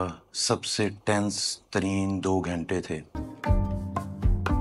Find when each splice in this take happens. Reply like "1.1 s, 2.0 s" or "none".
3.1 s